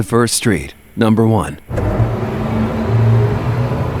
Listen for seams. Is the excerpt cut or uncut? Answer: cut